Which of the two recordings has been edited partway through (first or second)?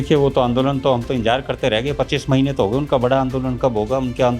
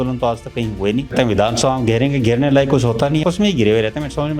second